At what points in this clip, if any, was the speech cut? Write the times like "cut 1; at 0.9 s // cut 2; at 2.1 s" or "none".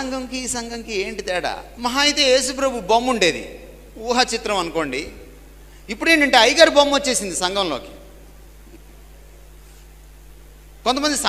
cut 1; at 1.7 s